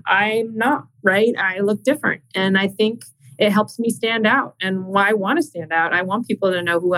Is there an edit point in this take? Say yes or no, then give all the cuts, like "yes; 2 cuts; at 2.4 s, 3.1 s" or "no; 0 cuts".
no; 0 cuts